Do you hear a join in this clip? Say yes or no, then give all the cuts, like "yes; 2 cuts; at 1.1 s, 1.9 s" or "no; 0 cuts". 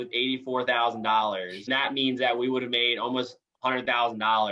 yes; 1 cut; at 1.6 s